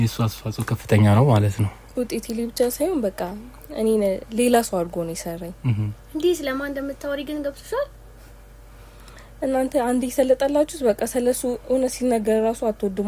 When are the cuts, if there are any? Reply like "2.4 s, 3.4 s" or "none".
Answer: none

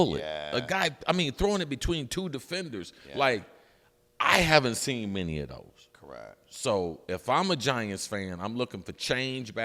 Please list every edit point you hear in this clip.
none

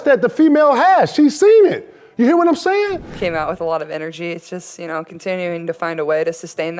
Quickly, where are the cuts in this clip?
3.1 s

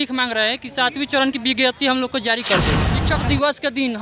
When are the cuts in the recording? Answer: 2.9 s

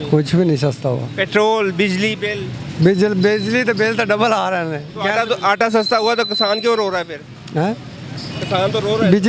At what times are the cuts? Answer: none

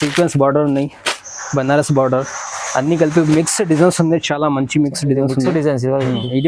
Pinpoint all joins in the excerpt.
none

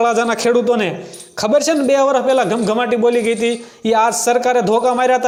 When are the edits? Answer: none

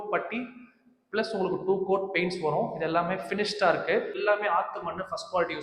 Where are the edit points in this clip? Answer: 4.2 s

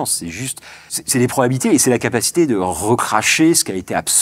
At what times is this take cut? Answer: 0.9 s

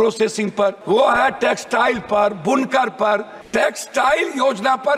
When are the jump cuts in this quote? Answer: 0.8 s, 3.4 s

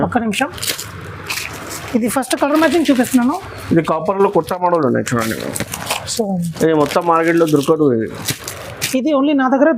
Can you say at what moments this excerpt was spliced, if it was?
none

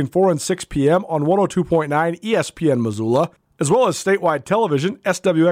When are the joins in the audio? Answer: 3.5 s

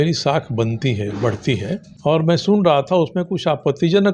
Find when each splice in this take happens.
1.9 s

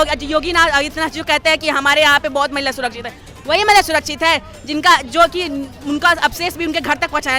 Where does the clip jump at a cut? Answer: none

